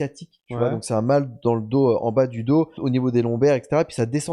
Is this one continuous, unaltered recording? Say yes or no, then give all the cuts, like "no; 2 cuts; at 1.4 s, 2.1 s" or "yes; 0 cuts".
no; 1 cut; at 2.8 s